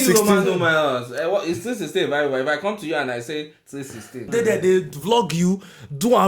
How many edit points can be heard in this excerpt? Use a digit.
1